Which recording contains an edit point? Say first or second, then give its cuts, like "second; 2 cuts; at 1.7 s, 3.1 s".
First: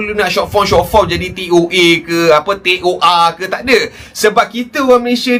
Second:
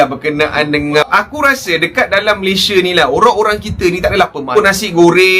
second; 2 cuts; at 1.1 s, 4.6 s